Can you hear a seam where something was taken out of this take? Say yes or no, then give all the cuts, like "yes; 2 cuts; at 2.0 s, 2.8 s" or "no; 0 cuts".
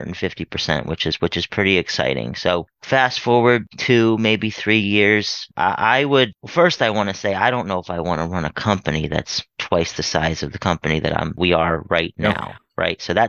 yes; 3 cuts; at 5.5 s, 6.4 s, 11.4 s